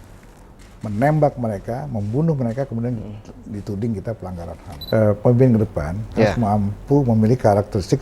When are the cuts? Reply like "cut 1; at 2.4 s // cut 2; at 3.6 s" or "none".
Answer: cut 1; at 4.7 s